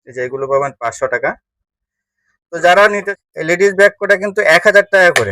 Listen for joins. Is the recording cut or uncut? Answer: cut